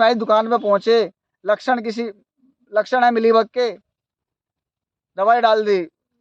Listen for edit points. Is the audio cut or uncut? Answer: uncut